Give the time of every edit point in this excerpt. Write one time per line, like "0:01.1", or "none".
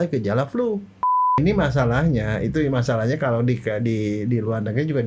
0:01.4